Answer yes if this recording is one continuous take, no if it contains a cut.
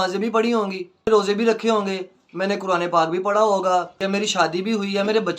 no